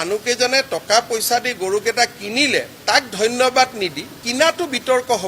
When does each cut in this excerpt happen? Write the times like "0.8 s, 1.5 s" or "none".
4.2 s